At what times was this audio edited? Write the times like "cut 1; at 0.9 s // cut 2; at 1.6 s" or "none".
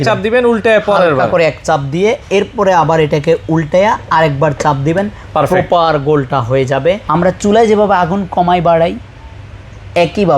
cut 1; at 7.0 s